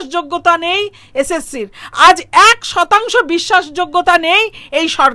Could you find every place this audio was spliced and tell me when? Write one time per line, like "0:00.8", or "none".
none